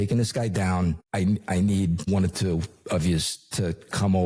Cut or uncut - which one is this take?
cut